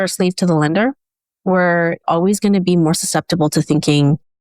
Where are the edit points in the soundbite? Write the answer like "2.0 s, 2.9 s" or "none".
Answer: 2.0 s